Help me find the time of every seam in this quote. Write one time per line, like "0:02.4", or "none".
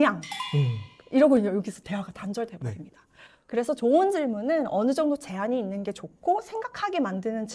none